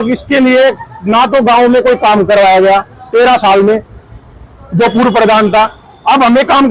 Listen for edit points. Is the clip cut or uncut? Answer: uncut